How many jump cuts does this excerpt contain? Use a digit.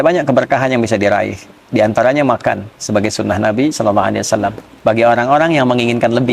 1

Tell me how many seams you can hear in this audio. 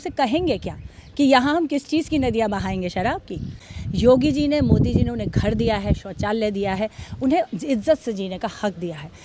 1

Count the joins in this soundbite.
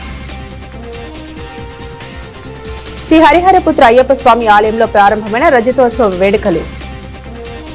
1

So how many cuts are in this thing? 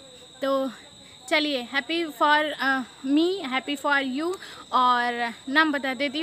0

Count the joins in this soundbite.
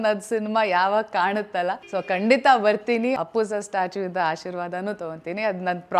2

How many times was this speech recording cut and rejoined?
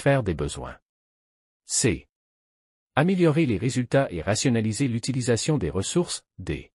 0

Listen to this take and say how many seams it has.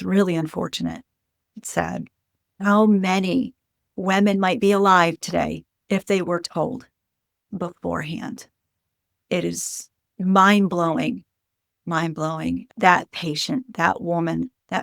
2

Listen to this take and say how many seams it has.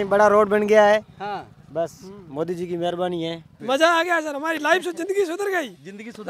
1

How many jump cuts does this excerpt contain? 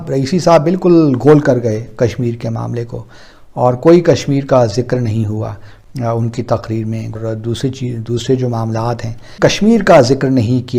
2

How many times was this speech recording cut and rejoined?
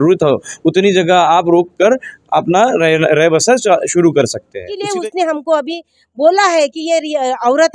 1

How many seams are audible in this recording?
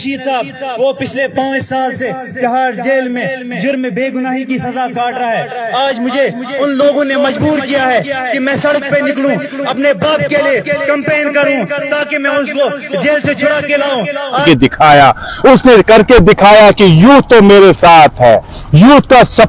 1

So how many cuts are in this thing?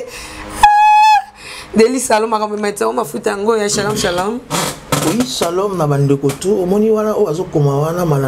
0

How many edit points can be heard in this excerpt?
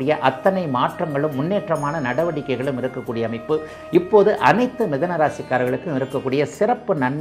0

